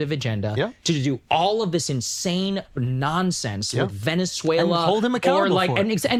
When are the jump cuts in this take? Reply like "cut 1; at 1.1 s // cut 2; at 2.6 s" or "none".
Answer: none